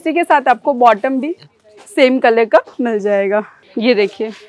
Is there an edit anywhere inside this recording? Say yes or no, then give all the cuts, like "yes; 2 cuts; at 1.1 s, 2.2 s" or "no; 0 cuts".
no; 0 cuts